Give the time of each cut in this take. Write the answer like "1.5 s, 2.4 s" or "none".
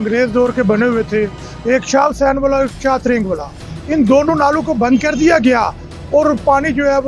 none